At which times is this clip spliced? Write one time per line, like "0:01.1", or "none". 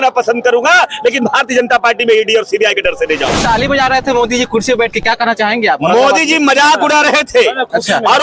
0:03.4